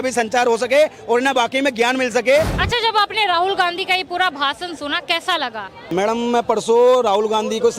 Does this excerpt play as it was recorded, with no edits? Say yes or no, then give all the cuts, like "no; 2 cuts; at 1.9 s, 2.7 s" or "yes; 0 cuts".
no; 2 cuts; at 2.6 s, 5.8 s